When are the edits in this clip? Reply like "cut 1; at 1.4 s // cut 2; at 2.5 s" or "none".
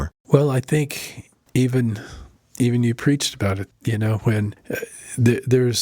cut 1; at 4.6 s